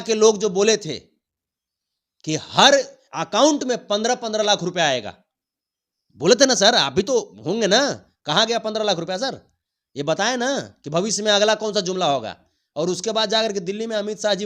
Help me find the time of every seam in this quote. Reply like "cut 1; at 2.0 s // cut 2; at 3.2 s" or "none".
none